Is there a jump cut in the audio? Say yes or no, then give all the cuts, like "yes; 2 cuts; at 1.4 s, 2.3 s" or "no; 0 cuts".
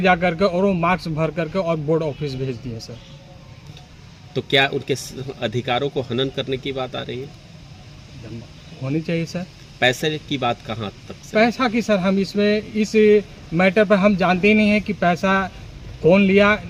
no; 0 cuts